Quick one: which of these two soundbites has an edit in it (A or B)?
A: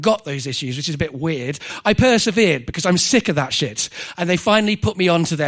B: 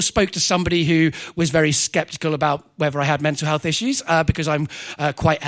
A